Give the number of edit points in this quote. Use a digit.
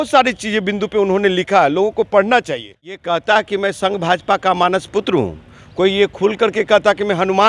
1